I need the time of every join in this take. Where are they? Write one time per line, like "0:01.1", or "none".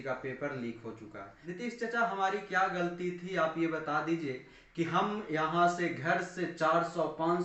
0:01.3